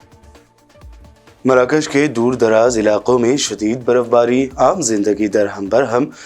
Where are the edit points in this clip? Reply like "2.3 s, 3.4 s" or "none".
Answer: none